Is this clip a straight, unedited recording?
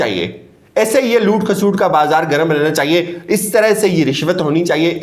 yes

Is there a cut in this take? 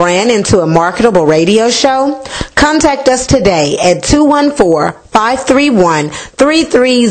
no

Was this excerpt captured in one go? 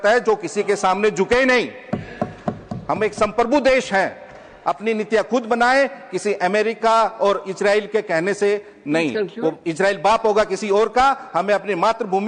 yes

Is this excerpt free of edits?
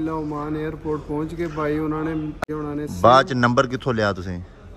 no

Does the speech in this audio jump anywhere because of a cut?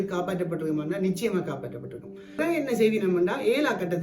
yes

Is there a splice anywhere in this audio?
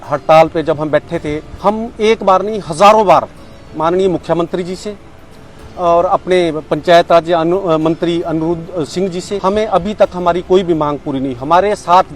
yes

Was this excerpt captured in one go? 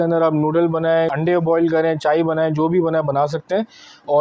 yes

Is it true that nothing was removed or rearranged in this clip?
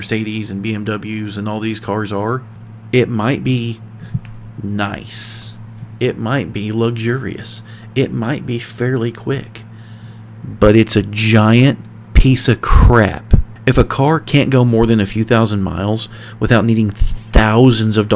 no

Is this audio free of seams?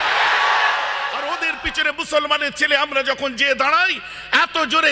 no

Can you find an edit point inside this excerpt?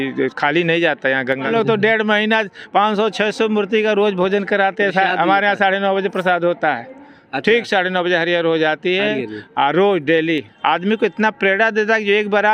yes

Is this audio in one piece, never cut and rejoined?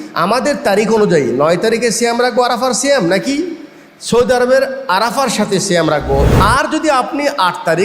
no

